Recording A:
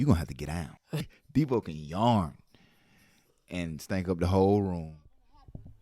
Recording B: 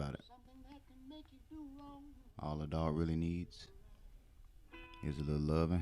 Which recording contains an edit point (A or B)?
A